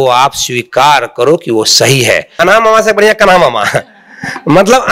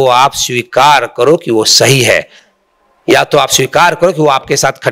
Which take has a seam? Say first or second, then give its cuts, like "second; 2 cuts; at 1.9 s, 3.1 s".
first; 1 cut; at 2.3 s